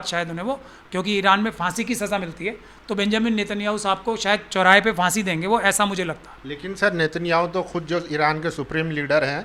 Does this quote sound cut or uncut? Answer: uncut